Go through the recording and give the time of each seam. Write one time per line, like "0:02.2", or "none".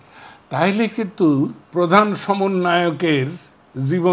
0:01.6